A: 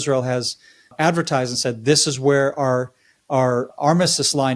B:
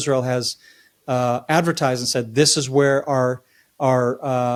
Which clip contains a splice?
A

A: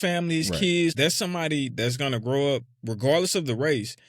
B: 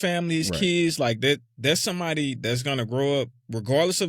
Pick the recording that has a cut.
A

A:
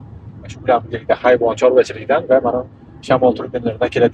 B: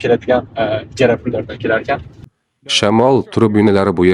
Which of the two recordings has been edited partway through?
B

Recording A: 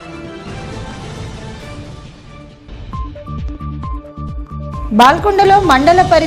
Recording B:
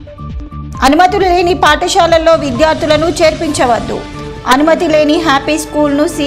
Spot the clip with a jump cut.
A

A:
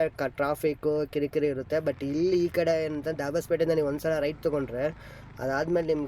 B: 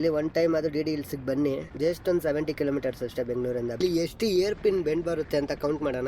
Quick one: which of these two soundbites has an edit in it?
B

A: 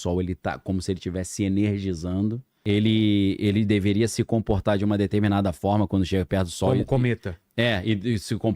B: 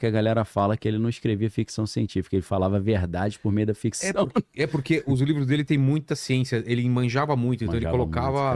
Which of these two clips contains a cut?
A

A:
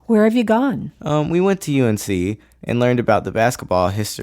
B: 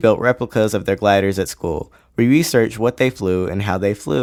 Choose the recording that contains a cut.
A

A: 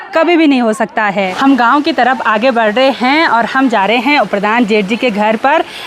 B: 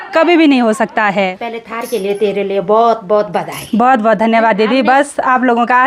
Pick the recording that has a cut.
B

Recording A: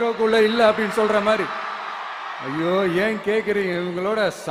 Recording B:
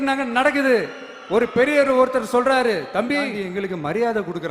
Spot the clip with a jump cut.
B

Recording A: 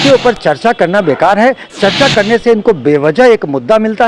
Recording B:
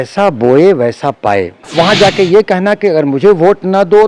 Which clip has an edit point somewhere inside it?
B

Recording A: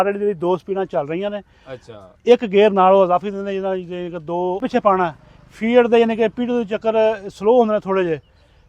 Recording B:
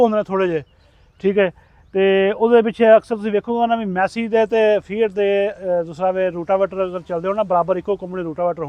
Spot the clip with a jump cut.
A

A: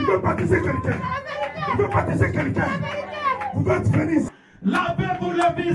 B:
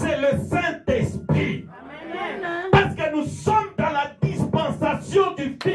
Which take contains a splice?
A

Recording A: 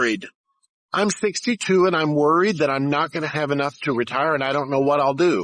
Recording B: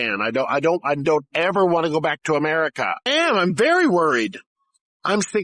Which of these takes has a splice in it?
B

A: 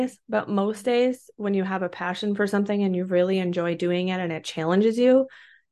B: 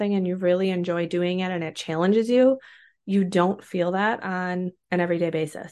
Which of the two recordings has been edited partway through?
B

